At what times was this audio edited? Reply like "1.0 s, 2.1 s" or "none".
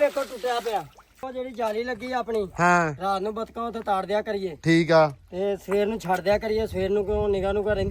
1.3 s